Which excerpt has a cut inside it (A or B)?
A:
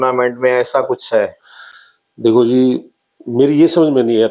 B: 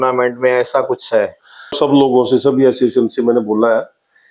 B